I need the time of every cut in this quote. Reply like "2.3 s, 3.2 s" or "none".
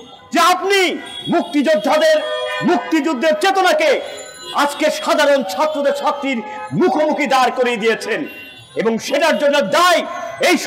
none